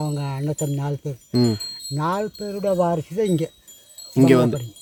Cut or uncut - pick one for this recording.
uncut